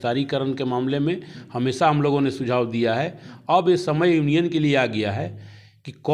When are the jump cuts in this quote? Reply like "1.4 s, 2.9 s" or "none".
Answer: none